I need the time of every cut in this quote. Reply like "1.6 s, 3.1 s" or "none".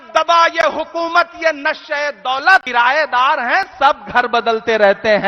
2.7 s